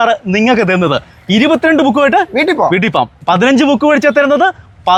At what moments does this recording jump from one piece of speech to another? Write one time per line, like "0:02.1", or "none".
none